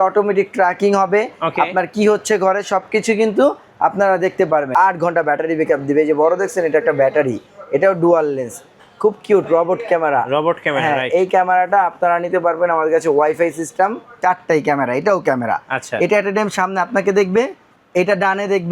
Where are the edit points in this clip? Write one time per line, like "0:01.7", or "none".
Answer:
0:04.7
0:14.2